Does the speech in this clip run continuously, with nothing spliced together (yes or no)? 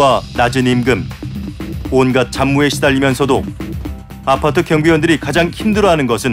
yes